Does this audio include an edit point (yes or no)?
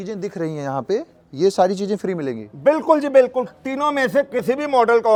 no